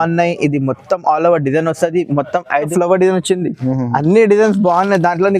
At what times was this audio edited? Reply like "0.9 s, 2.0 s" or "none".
2.7 s